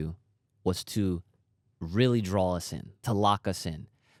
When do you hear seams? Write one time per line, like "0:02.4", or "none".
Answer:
none